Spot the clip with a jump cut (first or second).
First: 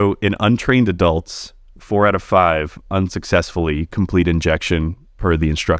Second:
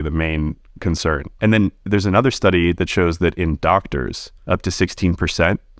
second